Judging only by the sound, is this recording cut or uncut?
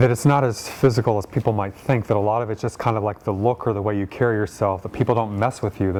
uncut